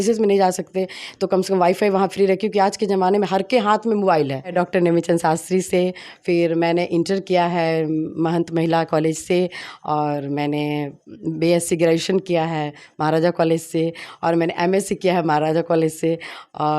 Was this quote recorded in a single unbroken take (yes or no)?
no